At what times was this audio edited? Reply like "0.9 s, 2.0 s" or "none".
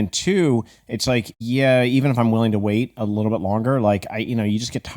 1.3 s